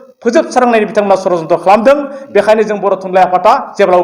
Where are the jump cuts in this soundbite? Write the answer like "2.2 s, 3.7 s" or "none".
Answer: none